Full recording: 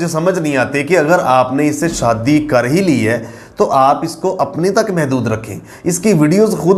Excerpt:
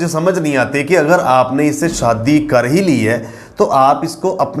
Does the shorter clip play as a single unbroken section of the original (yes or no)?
yes